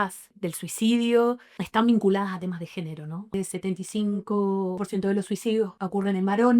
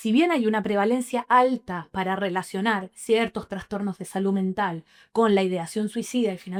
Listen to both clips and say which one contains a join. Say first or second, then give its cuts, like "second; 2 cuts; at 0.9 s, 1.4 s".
first; 3 cuts; at 3.3 s, 4.8 s, 5.8 s